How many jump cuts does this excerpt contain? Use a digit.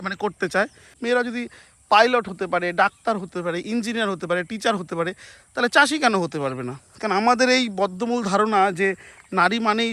1